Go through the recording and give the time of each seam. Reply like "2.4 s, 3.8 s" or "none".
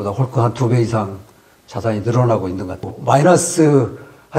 2.9 s